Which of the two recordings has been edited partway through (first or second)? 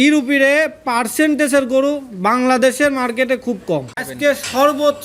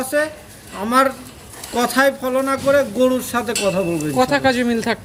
first